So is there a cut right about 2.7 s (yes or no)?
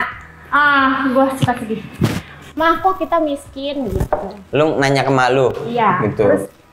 no